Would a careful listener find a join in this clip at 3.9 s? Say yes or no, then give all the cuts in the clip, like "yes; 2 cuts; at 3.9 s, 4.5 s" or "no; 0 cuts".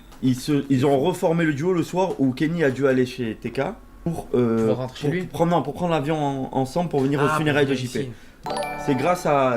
yes; 2 cuts; at 3.9 s, 8.3 s